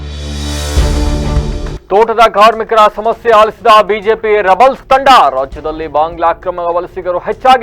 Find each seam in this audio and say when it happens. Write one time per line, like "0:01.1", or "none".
0:01.7

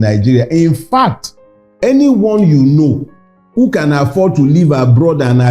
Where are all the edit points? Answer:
0:01.7

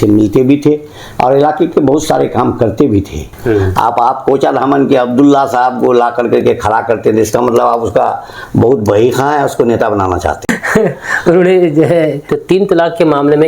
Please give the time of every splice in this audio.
0:03.2
0:12.3

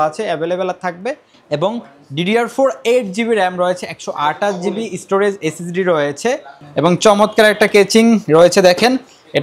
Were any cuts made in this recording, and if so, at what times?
0:01.3

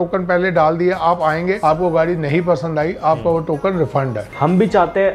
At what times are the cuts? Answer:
0:04.2

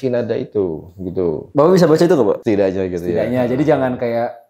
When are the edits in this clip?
0:02.4

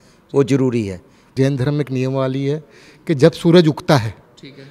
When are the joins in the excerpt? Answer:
0:01.3

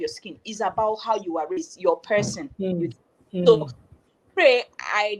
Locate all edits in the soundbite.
none

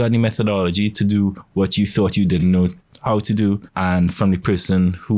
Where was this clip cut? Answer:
0:03.7

